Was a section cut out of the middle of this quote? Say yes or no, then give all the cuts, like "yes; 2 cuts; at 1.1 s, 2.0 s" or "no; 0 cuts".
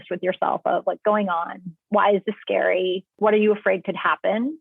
yes; 2 cuts; at 1.0 s, 3.2 s